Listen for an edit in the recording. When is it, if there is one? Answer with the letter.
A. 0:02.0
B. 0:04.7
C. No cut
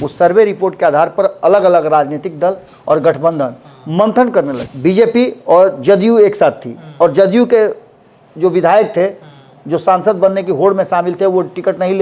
B